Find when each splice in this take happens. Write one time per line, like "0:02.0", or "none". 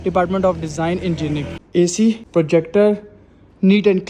0:01.6
0:02.2